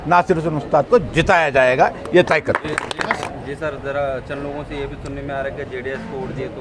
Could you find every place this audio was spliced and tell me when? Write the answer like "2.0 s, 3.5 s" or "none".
3.2 s